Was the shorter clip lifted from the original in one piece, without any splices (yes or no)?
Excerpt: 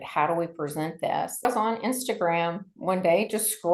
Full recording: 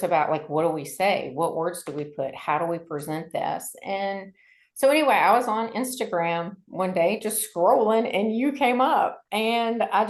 no